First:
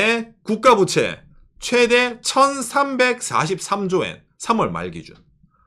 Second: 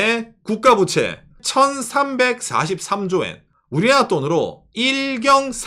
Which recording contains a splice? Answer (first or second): second